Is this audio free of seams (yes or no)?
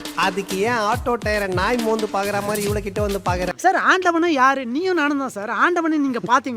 no